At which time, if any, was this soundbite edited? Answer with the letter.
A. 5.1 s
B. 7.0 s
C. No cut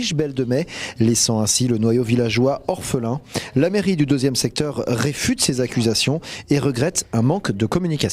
B